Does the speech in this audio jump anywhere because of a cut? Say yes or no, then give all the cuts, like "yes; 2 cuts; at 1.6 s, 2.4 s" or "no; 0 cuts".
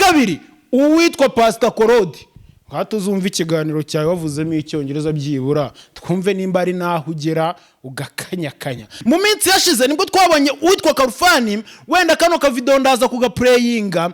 yes; 1 cut; at 8.9 s